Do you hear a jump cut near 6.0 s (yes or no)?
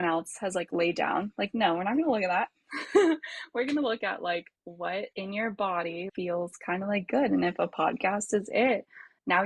yes